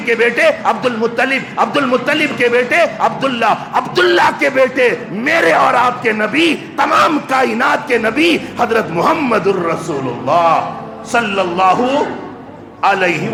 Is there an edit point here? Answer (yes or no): no